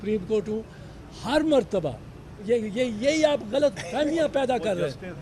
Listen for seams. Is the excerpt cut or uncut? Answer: cut